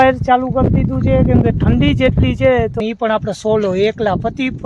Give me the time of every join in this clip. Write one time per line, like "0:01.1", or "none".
0:02.8